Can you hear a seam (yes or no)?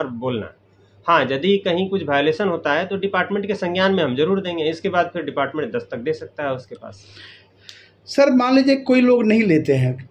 no